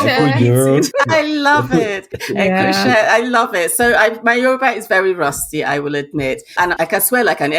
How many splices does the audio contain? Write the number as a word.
three